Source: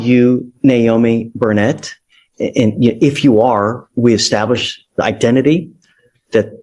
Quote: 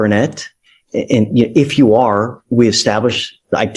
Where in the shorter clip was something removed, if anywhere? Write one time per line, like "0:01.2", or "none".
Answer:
none